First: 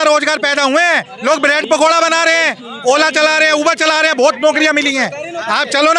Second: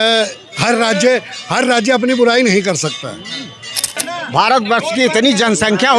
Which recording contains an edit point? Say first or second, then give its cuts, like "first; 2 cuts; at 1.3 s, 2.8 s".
second; 1 cut; at 3.9 s